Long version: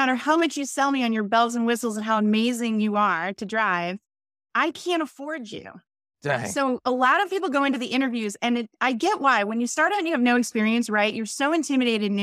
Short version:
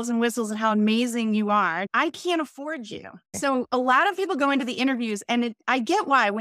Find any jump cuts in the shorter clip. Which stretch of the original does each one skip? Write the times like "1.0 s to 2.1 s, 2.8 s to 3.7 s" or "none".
3.3 s to 4.5 s, 5.9 s to 6.5 s